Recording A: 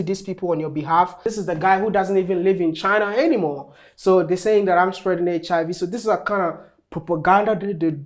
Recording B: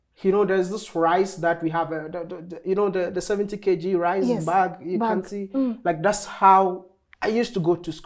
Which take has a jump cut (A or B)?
A